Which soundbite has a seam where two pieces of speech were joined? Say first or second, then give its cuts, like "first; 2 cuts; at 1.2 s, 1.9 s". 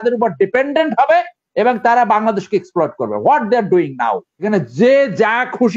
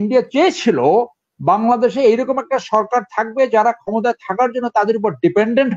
first; 1 cut; at 4.3 s